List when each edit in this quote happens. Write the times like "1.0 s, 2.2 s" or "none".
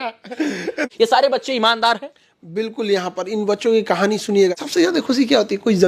0.8 s, 4.6 s